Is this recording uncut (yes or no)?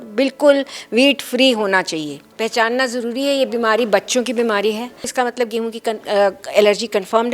no